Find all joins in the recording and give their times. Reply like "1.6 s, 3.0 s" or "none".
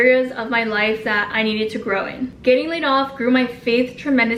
none